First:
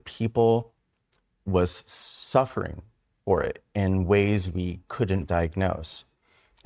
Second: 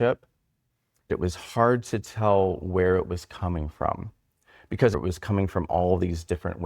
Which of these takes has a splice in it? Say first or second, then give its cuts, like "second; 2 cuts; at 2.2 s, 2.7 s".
second; 2 cuts; at 1.1 s, 4.9 s